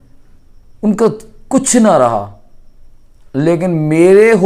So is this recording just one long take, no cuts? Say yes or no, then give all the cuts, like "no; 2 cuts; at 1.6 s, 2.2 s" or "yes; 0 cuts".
yes; 0 cuts